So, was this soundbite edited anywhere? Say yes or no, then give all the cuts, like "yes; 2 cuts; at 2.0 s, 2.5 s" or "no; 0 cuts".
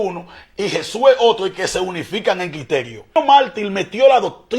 yes; 1 cut; at 3.1 s